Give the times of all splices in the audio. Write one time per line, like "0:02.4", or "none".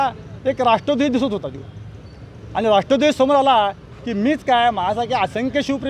none